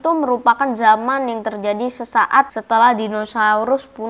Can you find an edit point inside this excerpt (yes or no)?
yes